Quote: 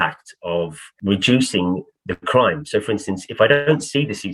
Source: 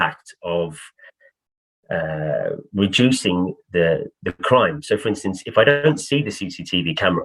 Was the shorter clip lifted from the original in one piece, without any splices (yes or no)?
no